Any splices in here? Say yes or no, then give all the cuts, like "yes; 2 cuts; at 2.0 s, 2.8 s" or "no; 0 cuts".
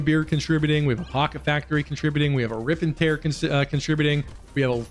no; 0 cuts